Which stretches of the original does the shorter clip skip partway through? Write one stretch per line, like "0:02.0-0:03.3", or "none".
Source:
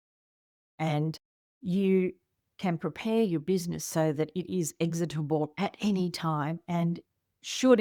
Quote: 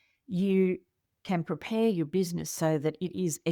none